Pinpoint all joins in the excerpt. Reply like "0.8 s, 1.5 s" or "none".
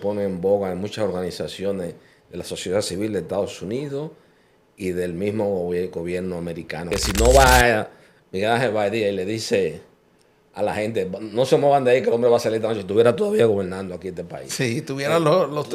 6.8 s